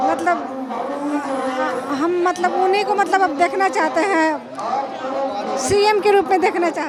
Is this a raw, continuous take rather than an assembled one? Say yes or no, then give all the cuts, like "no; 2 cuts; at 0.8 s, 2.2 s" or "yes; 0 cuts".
yes; 0 cuts